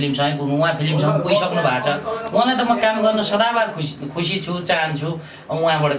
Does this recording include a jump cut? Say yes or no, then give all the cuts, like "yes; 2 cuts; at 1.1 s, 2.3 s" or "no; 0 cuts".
no; 0 cuts